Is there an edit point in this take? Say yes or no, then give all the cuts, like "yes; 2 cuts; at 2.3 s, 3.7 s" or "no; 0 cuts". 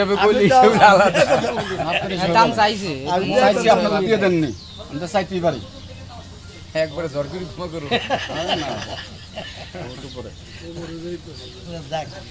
no; 0 cuts